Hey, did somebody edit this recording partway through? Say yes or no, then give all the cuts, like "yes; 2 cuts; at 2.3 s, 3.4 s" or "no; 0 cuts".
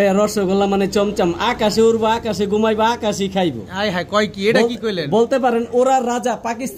no; 0 cuts